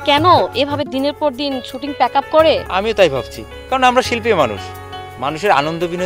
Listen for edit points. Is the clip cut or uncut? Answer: cut